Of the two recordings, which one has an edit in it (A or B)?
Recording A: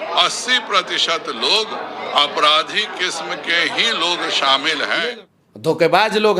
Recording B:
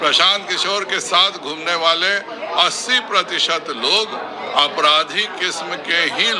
A